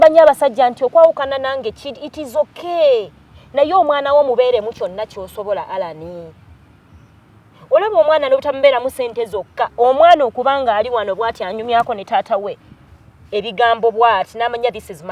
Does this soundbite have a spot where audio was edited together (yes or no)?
no